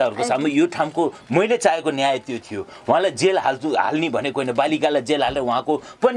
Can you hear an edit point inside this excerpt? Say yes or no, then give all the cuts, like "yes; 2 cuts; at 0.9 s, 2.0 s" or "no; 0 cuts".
no; 0 cuts